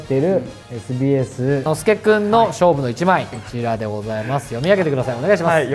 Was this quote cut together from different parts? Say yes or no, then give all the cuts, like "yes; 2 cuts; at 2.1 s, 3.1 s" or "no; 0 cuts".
yes; 2 cuts; at 1.7 s, 3.4 s